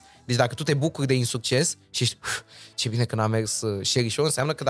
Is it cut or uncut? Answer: uncut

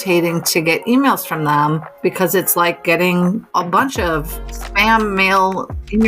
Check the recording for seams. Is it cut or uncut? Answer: cut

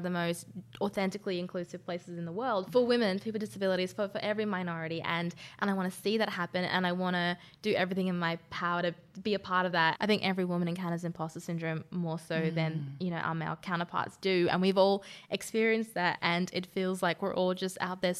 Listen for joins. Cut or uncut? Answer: cut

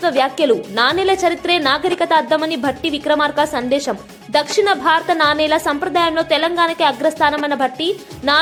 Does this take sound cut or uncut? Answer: uncut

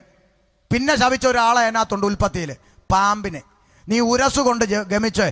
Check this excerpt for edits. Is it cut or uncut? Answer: uncut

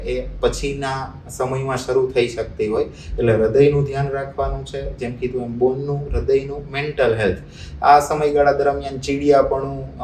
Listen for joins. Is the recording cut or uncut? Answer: uncut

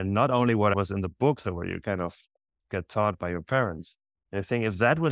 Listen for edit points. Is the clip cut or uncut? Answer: cut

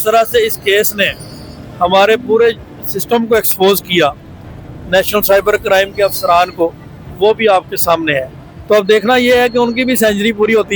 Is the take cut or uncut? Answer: uncut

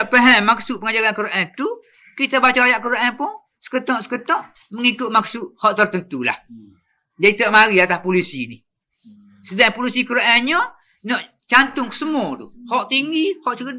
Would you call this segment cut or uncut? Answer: uncut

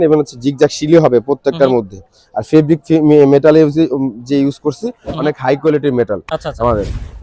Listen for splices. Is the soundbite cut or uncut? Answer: uncut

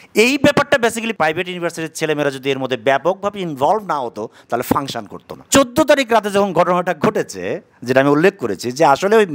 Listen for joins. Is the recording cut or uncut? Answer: cut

